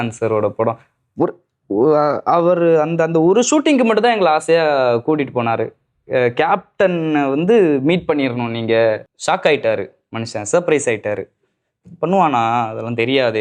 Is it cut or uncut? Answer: cut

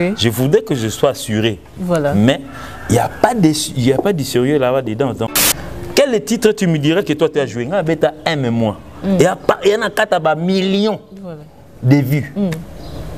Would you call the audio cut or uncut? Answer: cut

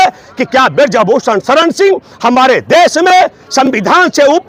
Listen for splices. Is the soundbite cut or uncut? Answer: uncut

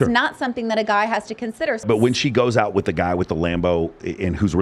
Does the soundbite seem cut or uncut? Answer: cut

